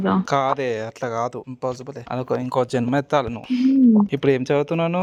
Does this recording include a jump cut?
no; 0 cuts

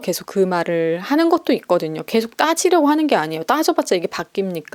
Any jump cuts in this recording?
no; 0 cuts

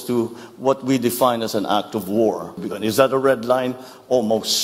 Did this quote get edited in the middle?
yes; 1 cut; at 2.7 s

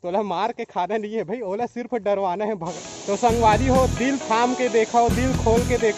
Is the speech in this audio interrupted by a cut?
yes; 1 cut; at 2.7 s

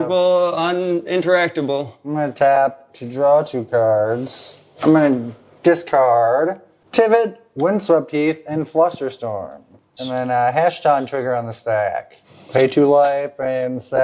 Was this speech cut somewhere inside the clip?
yes; 1 cut; at 4.6 s

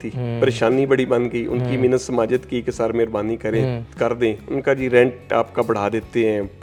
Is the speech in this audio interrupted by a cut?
no; 0 cuts

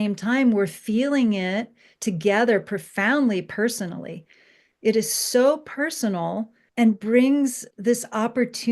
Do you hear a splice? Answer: yes; 2 cuts; at 6.6 s, 7.7 s

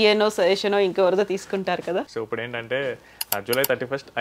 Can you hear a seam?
yes; 1 cut; at 2.1 s

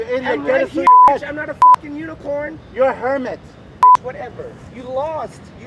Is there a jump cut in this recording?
no; 0 cuts

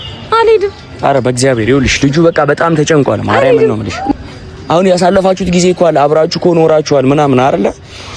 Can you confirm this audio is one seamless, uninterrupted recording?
no; 1 cut; at 4.1 s

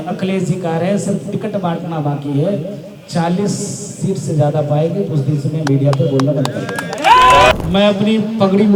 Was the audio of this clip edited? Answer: yes; 1 cut; at 7.5 s

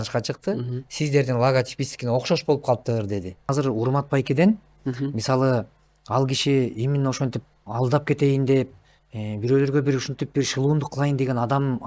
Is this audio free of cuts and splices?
no; 1 cut; at 3.5 s

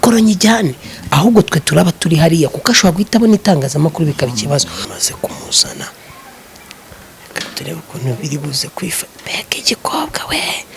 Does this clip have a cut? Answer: yes; 1 cut; at 4.8 s

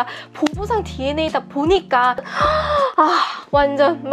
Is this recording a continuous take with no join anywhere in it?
no; 1 cut; at 2.3 s

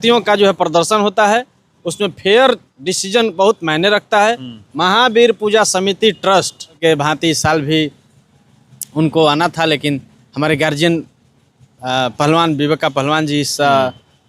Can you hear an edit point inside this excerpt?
yes; 1 cut; at 6.8 s

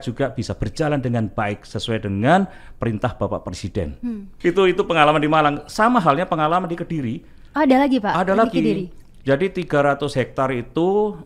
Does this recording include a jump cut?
no; 0 cuts

